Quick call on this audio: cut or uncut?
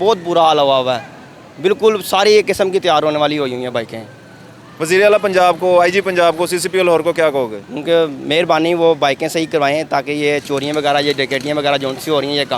uncut